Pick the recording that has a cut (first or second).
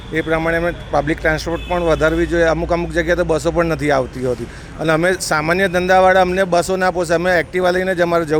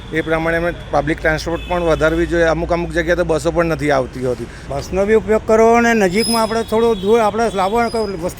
second